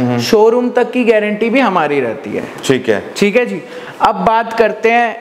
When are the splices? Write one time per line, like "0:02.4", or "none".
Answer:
none